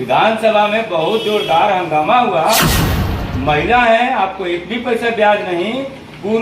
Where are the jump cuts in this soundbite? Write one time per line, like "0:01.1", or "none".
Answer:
0:03.0